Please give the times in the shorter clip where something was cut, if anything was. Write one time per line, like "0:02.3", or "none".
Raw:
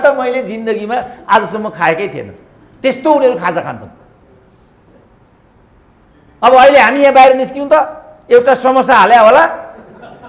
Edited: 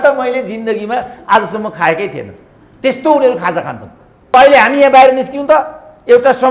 0:04.3